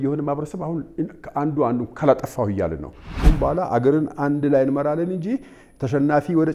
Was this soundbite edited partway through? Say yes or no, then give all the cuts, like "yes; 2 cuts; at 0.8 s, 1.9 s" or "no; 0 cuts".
yes; 1 cut; at 3.2 s